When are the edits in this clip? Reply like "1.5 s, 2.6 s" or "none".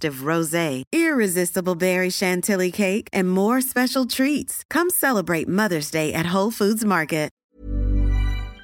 7.4 s

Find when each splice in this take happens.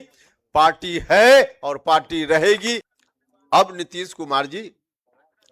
2.9 s

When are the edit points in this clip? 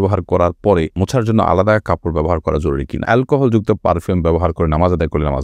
1.0 s, 3.0 s

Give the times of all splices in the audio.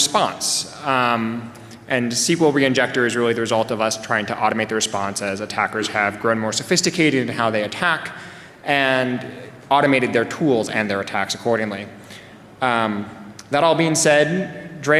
9.5 s

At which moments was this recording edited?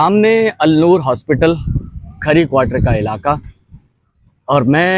none

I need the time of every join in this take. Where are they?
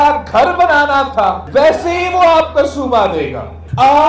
none

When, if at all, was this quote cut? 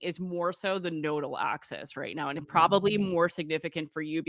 none

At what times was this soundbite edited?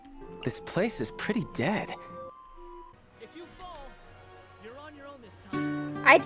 3.0 s

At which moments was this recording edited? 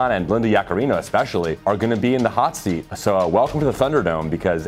1.6 s, 2.9 s

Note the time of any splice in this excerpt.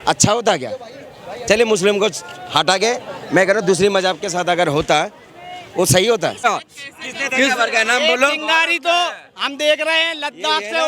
6.4 s

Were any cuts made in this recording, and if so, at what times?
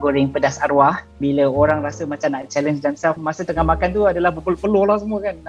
1.1 s, 3.2 s

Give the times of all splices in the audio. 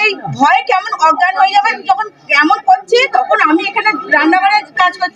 none

